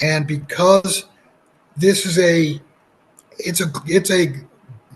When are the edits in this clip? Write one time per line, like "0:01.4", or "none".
none